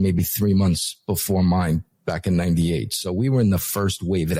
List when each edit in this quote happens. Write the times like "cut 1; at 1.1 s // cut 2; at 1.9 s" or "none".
none